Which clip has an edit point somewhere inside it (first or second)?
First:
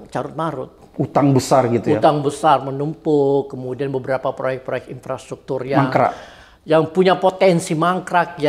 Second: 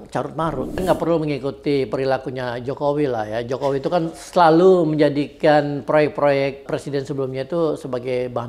second